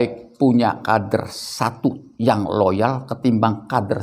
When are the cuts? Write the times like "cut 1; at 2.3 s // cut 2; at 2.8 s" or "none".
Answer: none